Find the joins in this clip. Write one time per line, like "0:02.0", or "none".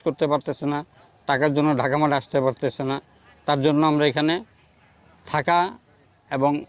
none